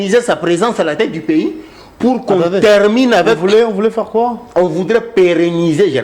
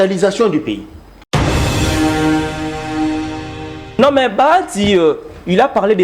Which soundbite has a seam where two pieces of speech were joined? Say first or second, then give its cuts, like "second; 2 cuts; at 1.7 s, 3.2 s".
second; 2 cuts; at 1.3 s, 4.0 s